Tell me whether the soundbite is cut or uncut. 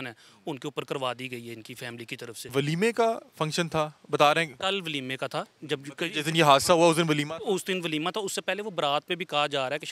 cut